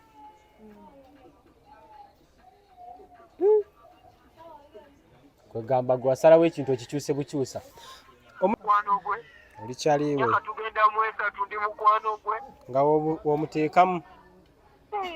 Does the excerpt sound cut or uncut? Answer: cut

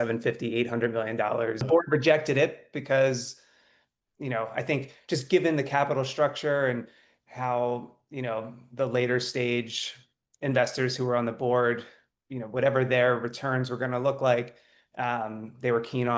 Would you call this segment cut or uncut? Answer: cut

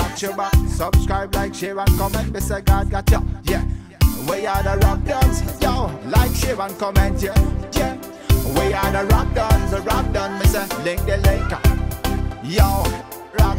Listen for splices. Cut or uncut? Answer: uncut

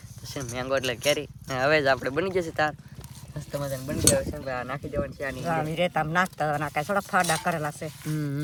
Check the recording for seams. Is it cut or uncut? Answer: uncut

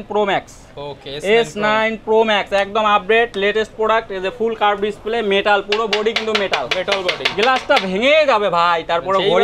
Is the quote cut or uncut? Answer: uncut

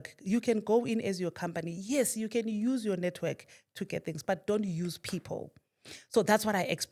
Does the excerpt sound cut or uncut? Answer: uncut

